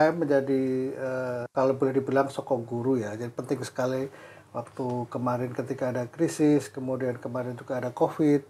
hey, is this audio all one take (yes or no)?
no